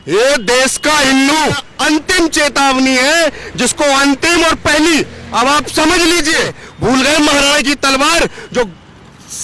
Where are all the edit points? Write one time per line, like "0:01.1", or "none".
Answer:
0:01.7
0:06.6